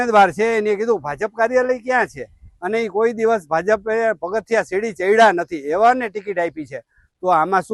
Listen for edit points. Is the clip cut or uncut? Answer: uncut